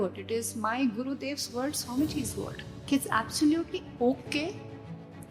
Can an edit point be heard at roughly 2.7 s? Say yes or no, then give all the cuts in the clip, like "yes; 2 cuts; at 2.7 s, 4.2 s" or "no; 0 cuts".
yes; 1 cut; at 2.7 s